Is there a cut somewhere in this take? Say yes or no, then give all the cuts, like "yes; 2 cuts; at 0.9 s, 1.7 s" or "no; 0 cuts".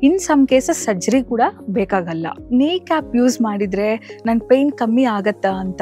yes; 1 cut; at 2.4 s